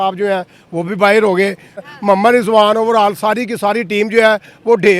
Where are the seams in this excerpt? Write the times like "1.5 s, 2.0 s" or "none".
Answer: 1.8 s